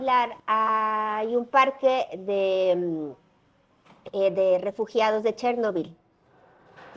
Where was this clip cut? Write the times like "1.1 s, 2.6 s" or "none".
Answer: none